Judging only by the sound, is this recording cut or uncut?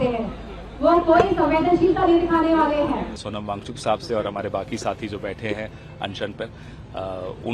cut